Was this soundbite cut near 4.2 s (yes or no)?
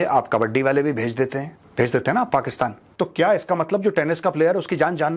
no